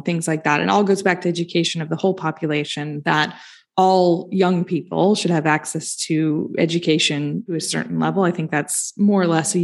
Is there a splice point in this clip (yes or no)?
yes